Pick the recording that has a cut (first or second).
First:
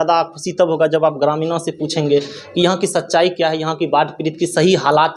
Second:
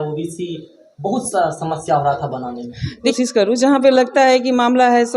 second